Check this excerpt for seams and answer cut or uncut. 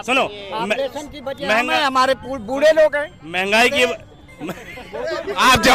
uncut